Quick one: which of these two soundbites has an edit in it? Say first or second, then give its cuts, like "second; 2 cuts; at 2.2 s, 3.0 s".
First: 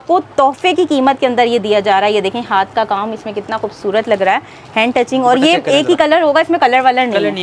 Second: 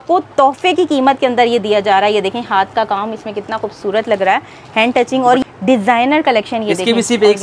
second; 1 cut; at 5.4 s